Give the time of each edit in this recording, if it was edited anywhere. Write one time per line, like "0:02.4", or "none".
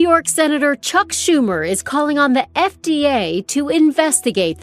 none